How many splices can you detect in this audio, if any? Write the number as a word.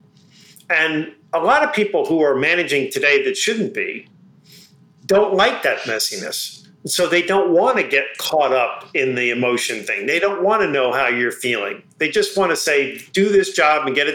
zero